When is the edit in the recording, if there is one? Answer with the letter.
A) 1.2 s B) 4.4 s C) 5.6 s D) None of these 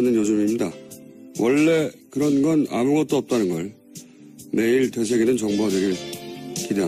B